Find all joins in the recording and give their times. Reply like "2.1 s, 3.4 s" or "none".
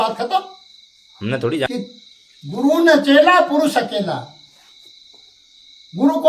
1.7 s